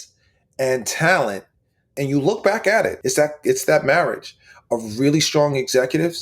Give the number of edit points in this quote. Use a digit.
2